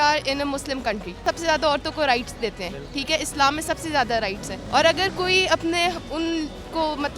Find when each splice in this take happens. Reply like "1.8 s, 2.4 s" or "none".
1.2 s, 4.5 s